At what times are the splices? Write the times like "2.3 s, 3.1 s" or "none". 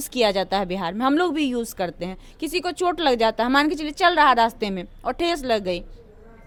none